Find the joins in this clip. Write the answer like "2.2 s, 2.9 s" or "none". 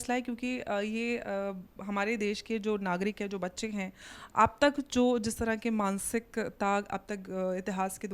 none